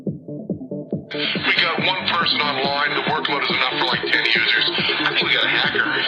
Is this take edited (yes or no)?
no